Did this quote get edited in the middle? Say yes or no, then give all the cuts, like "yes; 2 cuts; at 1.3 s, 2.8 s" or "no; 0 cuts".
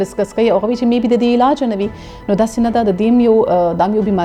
no; 0 cuts